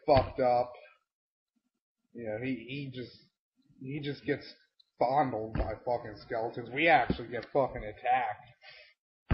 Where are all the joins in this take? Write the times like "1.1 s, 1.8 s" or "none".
1.9 s